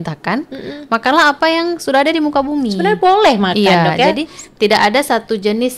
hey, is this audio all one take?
yes; 0 cuts

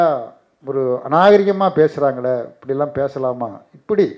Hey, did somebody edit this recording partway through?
no; 0 cuts

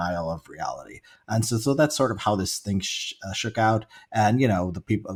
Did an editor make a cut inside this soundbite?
no; 0 cuts

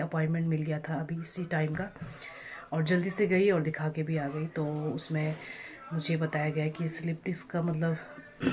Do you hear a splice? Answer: no; 0 cuts

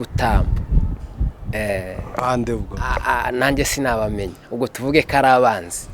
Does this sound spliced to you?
no; 0 cuts

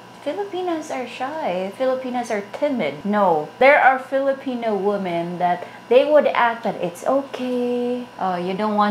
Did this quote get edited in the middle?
yes; 2 cuts; at 3.5 s, 8.1 s

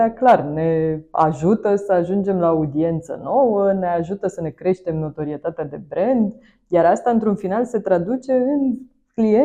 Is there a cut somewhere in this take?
no; 0 cuts

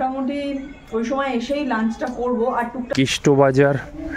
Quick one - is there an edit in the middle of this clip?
yes; 1 cut; at 2.9 s

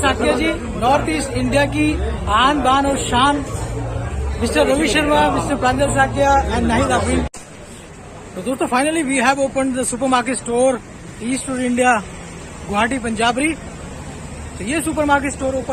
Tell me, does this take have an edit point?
yes; 1 cut; at 7.3 s

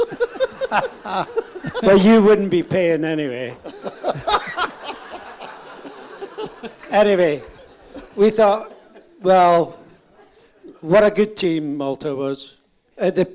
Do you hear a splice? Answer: no; 0 cuts

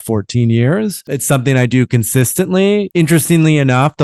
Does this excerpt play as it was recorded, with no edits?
no; 2 cuts; at 1.0 s, 2.9 s

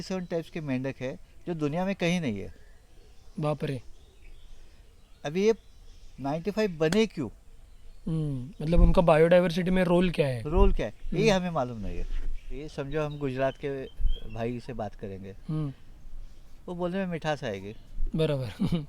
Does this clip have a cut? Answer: yes; 1 cut; at 12.6 s

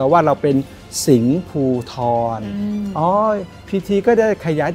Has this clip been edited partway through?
yes; 1 cut; at 3.5 s

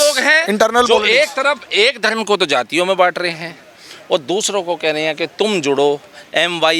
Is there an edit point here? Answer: no; 0 cuts

